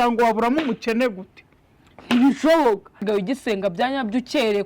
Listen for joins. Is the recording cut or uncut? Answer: cut